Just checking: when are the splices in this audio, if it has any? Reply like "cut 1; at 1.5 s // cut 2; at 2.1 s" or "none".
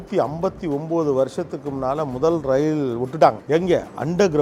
none